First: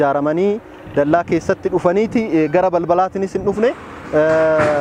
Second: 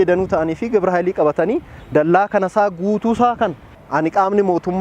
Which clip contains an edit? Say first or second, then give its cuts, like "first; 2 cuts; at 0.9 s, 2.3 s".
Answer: second; 1 cut; at 3.8 s